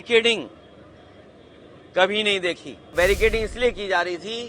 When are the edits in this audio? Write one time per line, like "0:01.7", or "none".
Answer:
0:02.9

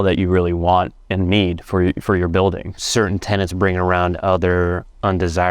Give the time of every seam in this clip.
0:02.7

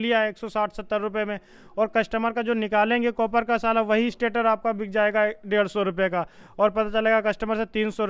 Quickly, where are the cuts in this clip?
none

